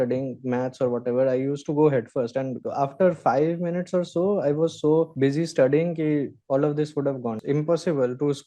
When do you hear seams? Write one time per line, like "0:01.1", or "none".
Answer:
0:07.4